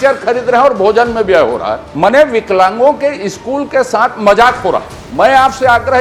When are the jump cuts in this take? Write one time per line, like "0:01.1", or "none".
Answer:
0:01.8
0:05.0